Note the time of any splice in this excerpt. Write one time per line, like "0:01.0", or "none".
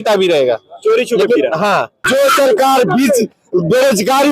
0:02.1